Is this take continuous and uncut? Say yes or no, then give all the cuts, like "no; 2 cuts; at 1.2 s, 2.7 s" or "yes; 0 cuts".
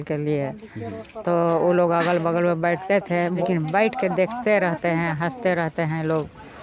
no; 1 cut; at 3.4 s